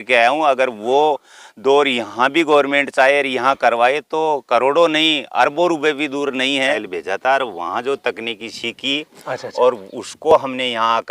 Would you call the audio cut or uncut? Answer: cut